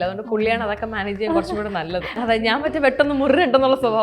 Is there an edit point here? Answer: yes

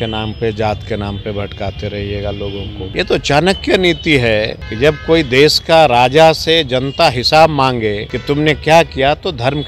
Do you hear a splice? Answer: yes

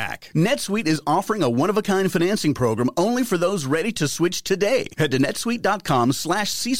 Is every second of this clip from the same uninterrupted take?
yes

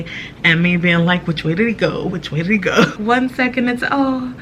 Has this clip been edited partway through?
yes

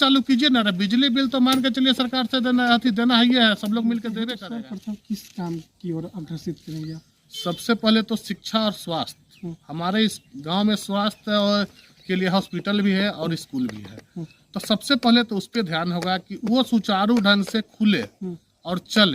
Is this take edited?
yes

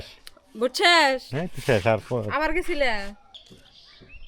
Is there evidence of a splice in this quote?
yes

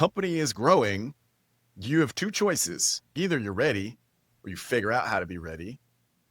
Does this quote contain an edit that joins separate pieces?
yes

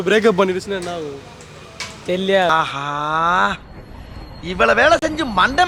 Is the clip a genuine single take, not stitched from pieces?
yes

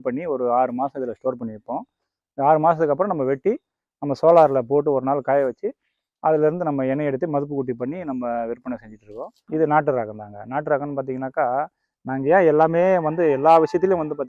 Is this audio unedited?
no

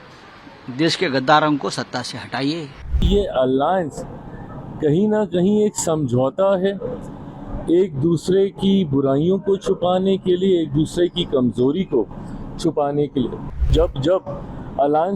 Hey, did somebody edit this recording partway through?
yes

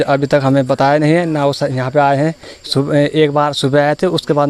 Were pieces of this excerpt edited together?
no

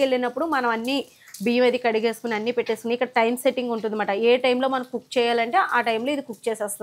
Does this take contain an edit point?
no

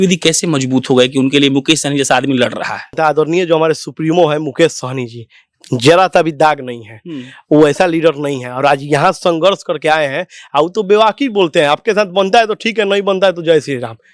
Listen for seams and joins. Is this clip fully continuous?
no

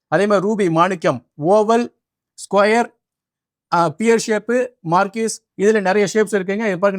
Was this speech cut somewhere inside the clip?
no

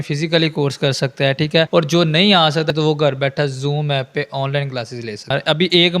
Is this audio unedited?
no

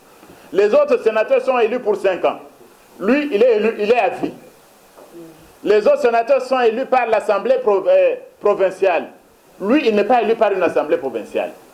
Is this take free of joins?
yes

